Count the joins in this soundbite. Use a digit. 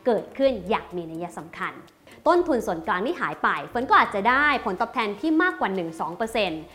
1